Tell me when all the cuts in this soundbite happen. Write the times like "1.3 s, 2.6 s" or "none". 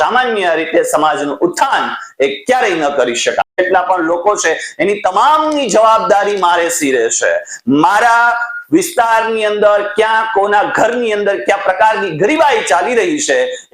3.6 s